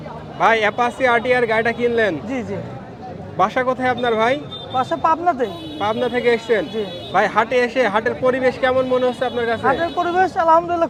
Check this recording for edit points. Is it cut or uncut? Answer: uncut